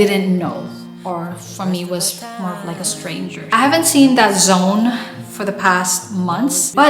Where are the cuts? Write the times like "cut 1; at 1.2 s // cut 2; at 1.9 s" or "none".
cut 1; at 3.5 s

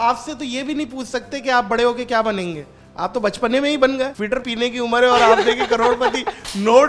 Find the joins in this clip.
cut 1; at 4.4 s

